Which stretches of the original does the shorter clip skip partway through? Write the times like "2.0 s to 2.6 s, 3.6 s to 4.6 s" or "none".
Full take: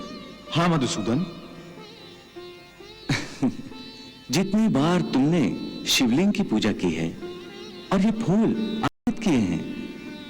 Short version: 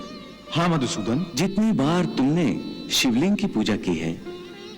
1.3 s to 4.3 s